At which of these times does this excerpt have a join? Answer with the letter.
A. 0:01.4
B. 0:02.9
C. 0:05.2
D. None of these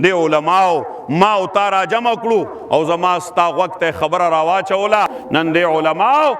C